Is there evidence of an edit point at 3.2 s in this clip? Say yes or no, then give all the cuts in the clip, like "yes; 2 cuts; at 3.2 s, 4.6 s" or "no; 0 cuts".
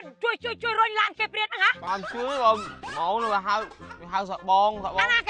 no; 1 cut; at 1.8 s